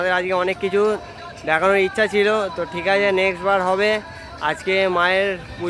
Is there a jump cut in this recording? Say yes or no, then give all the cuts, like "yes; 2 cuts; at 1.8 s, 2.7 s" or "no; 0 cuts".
no; 0 cuts